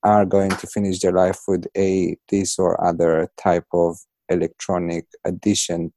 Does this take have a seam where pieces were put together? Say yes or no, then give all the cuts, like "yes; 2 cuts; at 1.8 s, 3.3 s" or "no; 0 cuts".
no; 0 cuts